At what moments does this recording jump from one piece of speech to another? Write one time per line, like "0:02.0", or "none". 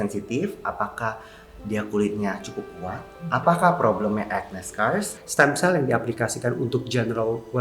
0:05.2